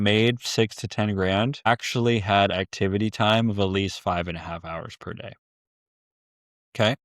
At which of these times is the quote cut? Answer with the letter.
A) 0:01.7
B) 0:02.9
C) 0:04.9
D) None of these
A